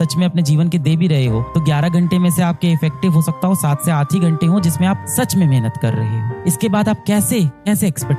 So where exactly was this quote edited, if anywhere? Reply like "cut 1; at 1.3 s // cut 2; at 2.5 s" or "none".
none